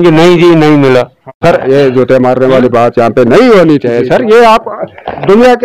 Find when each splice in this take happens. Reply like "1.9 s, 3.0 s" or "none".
1.3 s